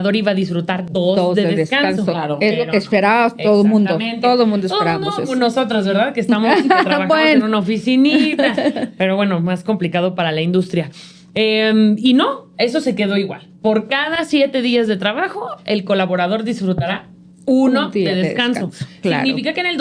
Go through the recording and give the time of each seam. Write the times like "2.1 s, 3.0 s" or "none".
none